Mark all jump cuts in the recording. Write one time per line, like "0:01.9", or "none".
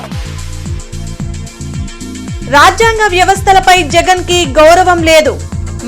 0:01.0